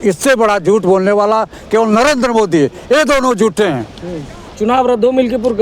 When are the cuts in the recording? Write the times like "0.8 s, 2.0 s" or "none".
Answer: 4.5 s